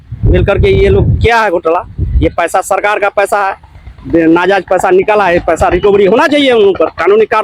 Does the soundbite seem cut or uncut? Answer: uncut